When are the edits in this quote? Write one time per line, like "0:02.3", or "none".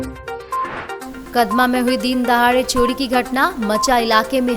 0:01.1